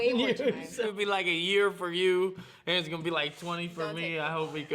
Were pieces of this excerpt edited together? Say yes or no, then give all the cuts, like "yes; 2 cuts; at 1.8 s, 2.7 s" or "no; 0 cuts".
no; 0 cuts